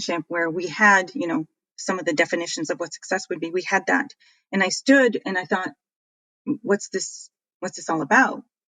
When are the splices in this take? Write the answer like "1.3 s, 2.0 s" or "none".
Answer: 1.8 s

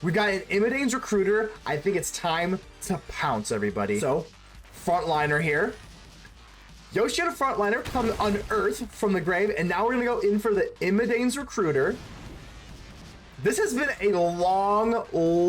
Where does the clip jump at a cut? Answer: 4.0 s

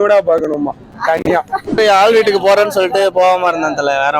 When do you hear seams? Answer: 1.6 s

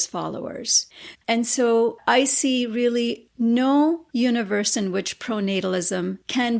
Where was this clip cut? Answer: 0.8 s, 2.0 s

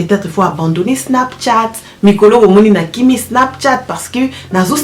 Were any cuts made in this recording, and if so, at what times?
none

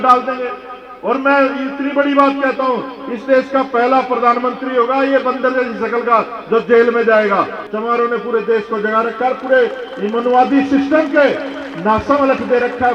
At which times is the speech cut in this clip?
7.6 s

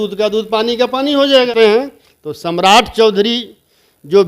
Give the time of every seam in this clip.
1.5 s

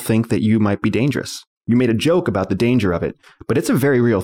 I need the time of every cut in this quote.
none

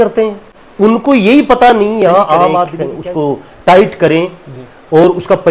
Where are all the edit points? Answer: 2.8 s

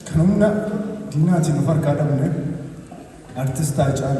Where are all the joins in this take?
none

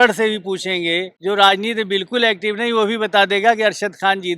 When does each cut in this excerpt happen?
1.1 s

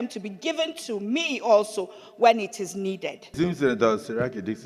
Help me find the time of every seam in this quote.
3.2 s

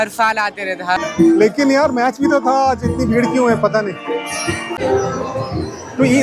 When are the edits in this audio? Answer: 1.0 s, 4.7 s

